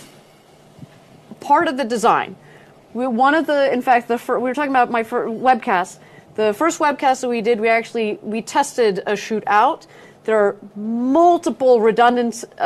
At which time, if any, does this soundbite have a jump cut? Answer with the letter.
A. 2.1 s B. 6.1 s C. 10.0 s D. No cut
A